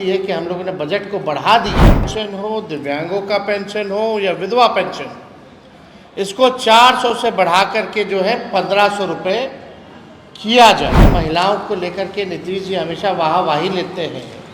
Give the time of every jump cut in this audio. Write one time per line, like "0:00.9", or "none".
0:11.1